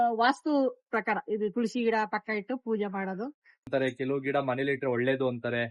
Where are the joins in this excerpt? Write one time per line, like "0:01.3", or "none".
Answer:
0:03.7